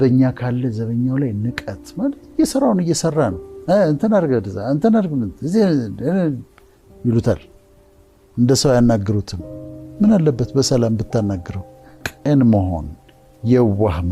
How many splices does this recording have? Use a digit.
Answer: 1